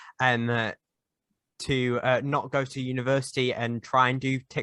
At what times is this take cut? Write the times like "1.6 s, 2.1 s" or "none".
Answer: none